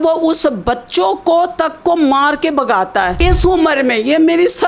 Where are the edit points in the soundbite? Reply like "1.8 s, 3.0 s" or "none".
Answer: 3.2 s